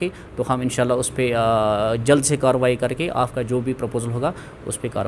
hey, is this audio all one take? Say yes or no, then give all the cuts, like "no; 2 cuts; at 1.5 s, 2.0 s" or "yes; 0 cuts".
yes; 0 cuts